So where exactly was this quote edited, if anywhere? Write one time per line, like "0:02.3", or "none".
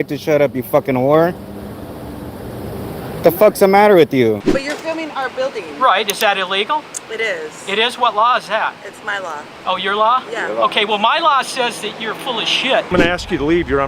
0:04.4
0:12.9